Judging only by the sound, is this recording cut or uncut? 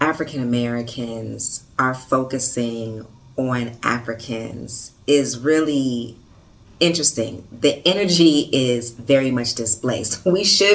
uncut